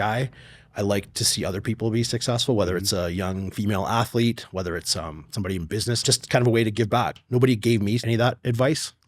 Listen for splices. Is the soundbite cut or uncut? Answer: cut